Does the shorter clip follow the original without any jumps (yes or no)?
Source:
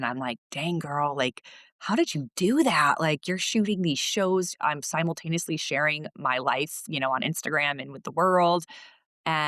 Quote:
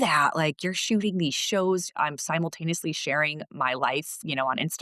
yes